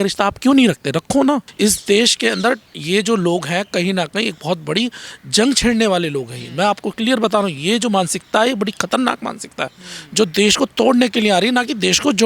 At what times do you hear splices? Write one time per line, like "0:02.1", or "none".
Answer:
0:01.5

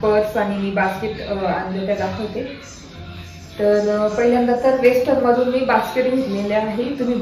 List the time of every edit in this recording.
none

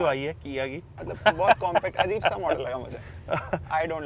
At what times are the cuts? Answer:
0:00.9

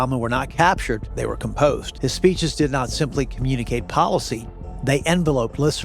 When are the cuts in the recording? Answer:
0:01.1
0:01.9

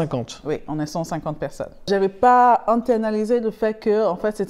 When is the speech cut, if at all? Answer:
0:01.9

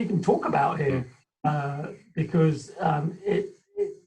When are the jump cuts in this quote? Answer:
none

